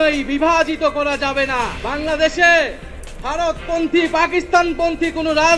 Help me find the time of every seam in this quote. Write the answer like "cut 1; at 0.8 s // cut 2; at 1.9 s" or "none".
cut 1; at 1.8 s

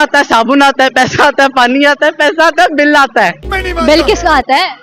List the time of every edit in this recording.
none

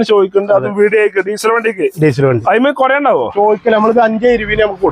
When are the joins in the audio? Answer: cut 1; at 3.3 s

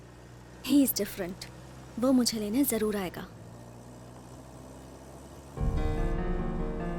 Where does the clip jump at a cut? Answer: none

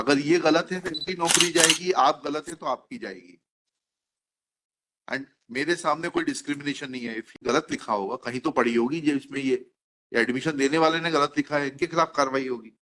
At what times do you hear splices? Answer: cut 1; at 7.3 s

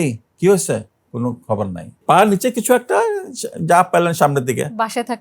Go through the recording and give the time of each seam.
cut 1; at 2.0 s

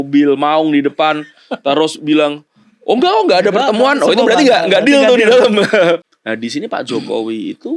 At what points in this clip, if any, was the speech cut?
cut 1; at 6.1 s

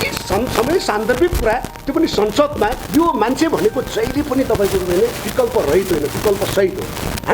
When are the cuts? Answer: cut 1; at 2.8 s

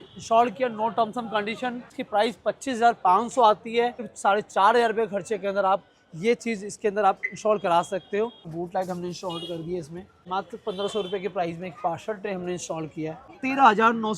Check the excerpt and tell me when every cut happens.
cut 1; at 1.9 s // cut 2; at 4.1 s // cut 3; at 8.5 s // cut 4; at 10.1 s // cut 5; at 13.3 s

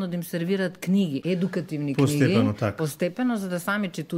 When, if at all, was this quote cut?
cut 1; at 1.2 s

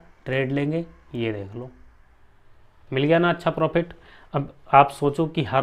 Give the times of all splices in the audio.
none

